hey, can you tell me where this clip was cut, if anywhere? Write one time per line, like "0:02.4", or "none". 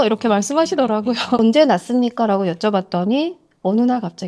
0:01.4